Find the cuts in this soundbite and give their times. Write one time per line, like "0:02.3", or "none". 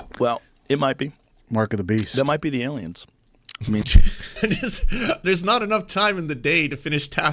0:04.2